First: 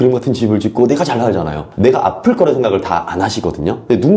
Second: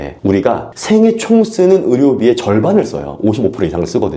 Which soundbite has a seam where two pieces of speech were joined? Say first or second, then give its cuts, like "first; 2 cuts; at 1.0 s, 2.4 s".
first; 1 cut; at 1.7 s